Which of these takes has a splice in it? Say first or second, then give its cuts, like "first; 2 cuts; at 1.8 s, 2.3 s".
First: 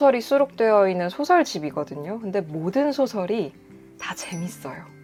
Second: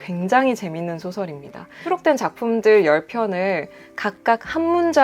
second; 1 cut; at 1.8 s